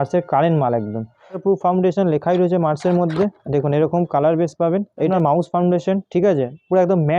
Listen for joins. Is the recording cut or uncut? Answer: cut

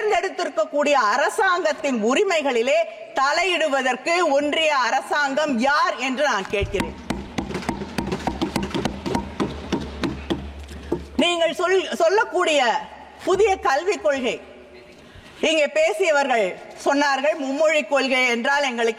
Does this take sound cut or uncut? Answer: uncut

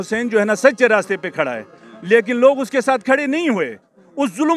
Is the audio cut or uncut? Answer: uncut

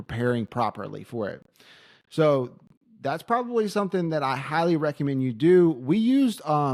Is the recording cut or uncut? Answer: uncut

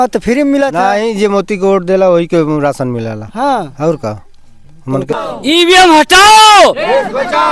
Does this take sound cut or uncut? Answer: cut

